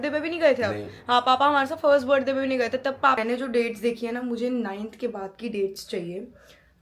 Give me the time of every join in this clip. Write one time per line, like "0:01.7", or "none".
0:03.2